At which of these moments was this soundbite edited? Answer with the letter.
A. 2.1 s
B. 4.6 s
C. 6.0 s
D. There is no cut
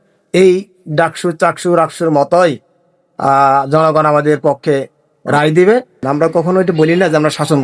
C